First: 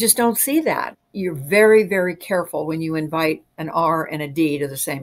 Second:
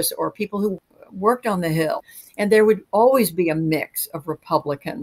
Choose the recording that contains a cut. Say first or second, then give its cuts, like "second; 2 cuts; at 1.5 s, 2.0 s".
second; 2 cuts; at 0.8 s, 2.1 s